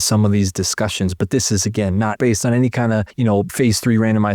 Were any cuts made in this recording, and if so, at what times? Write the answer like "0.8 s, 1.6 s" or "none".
2.2 s, 3.2 s